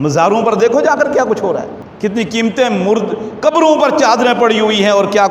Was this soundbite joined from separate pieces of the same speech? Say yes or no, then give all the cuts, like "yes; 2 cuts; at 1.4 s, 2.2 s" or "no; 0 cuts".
yes; 1 cut; at 1.8 s